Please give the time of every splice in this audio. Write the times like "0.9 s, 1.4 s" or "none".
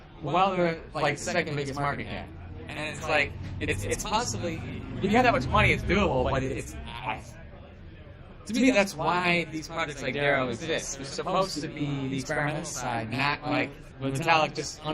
13.8 s